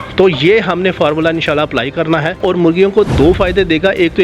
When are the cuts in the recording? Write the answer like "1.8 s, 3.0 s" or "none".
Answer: 2.4 s